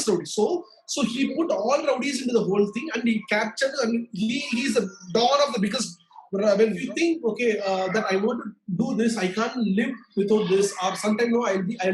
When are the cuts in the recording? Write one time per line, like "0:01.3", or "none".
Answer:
0:06.8